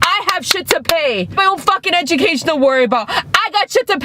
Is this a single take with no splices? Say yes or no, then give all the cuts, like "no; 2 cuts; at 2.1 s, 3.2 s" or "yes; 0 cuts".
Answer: no; 1 cut; at 1.4 s